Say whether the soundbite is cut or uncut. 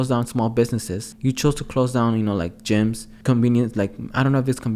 cut